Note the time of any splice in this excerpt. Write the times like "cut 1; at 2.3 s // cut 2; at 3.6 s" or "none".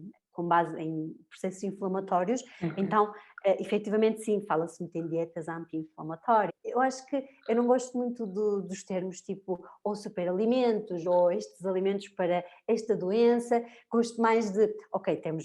cut 1; at 6.5 s

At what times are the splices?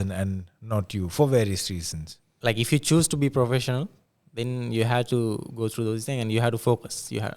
cut 1; at 2.3 s

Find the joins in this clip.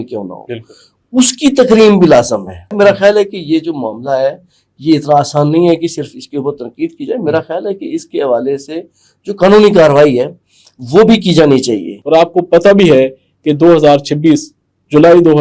cut 1; at 2.7 s // cut 2; at 11.9 s

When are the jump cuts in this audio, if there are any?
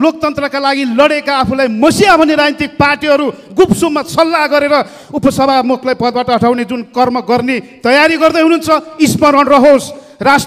none

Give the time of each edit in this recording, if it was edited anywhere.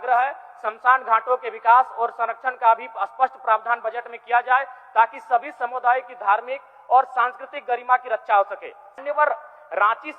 cut 1; at 9.0 s

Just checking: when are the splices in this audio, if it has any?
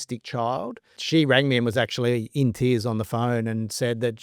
cut 1; at 1.0 s

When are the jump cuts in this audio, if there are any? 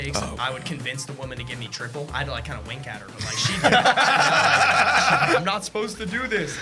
none

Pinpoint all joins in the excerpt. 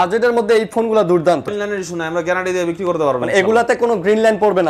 cut 1; at 1.5 s

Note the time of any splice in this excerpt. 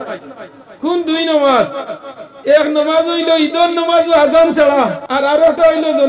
cut 1; at 5.0 s

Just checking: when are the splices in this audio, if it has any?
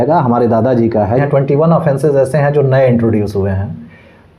cut 1; at 1.2 s

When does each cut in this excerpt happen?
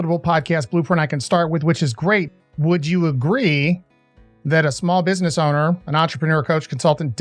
cut 1; at 2.3 s

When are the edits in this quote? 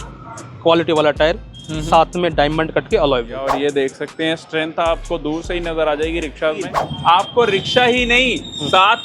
cut 1; at 3.5 s // cut 2; at 6.8 s

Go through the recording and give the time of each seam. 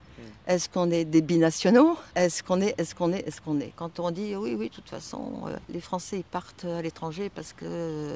cut 1; at 2.1 s // cut 2; at 3.8 s // cut 3; at 5.6 s

